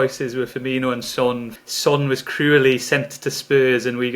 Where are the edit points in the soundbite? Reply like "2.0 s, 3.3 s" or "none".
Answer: 1.5 s

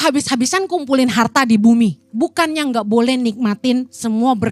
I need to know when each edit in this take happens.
2.0 s

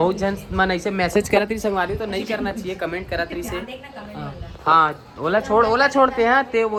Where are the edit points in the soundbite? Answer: none

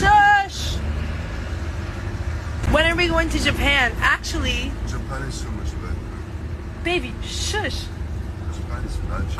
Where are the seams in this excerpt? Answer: none

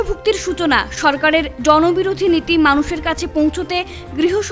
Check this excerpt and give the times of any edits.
none

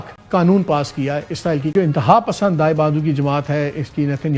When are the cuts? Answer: 1.7 s

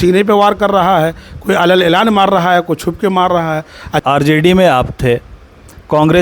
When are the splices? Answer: 4.0 s

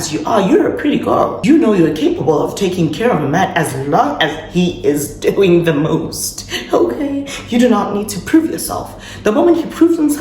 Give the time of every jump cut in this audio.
1.4 s

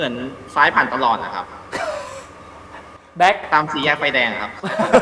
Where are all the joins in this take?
none

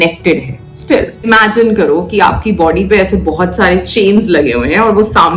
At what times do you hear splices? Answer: 1.3 s

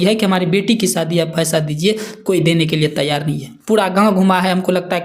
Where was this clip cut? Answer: none

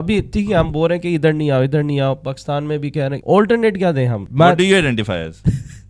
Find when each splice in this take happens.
3.2 s, 4.3 s

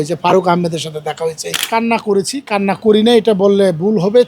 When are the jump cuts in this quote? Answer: 1.5 s

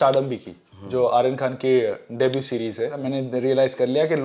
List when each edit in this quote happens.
3.0 s

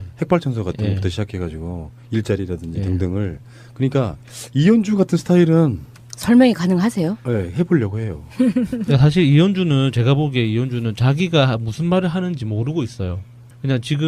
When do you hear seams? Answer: none

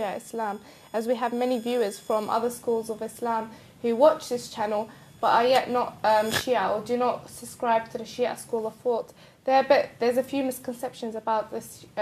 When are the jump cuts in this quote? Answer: none

